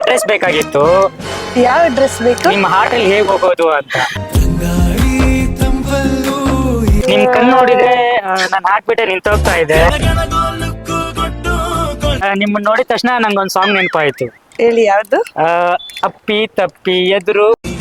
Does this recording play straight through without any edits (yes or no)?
no